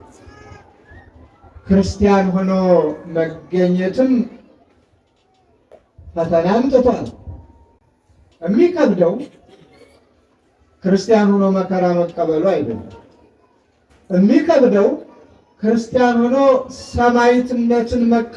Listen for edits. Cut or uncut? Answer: uncut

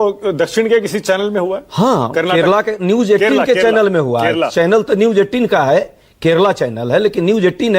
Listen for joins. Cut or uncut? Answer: uncut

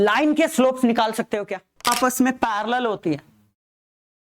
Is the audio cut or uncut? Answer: cut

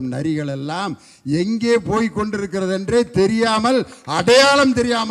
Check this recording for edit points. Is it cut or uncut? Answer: uncut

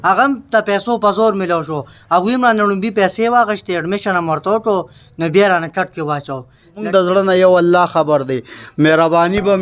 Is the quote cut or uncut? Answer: cut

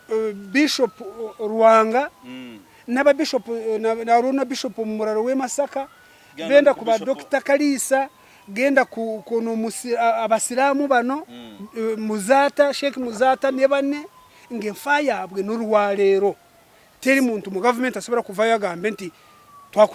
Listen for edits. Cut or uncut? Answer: uncut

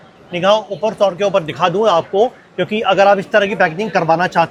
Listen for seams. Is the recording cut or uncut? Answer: uncut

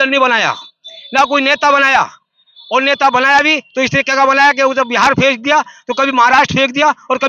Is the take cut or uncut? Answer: uncut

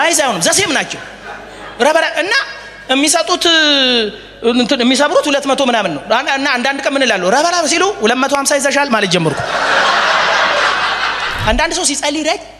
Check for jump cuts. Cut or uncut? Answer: cut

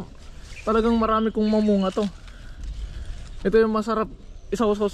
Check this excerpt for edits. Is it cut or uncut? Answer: uncut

